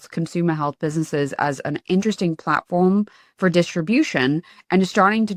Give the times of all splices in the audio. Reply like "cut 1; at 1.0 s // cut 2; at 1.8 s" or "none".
none